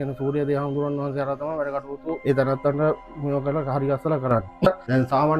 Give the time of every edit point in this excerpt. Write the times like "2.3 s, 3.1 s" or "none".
2.2 s, 4.7 s

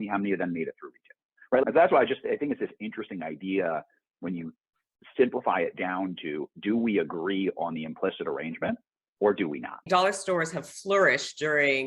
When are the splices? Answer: 1.6 s, 9.8 s

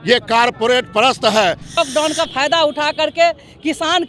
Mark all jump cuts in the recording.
1.8 s

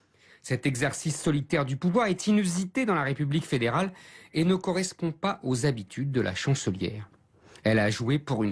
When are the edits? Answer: none

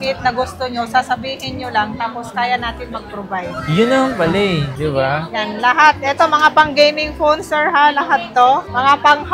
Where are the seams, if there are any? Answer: none

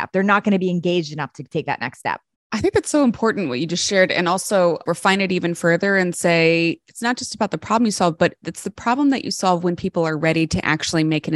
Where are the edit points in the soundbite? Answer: 2.3 s, 4.8 s

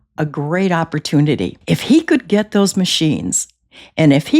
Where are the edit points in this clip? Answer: 1.5 s

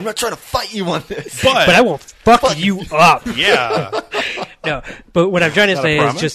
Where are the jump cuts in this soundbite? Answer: none

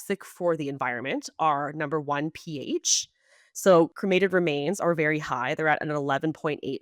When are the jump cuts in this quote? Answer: none

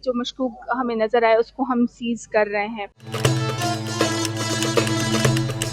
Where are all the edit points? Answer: 3.0 s

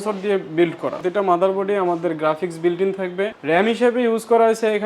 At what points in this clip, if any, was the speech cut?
1.0 s, 3.4 s

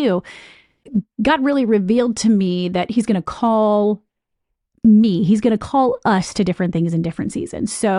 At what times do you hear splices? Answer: 1.0 s

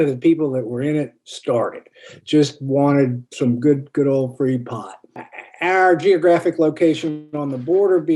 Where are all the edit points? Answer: none

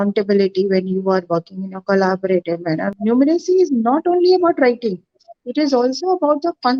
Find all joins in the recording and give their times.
2.9 s

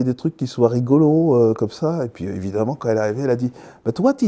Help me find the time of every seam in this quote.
none

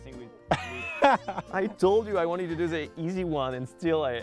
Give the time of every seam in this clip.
1.4 s

